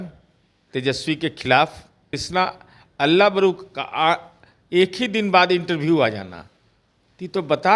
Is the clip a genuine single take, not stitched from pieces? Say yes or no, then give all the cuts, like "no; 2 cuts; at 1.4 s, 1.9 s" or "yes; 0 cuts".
no; 1 cut; at 2.2 s